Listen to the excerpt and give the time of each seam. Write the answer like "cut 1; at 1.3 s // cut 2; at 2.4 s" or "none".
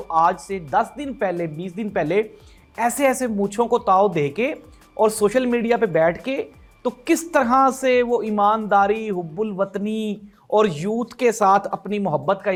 none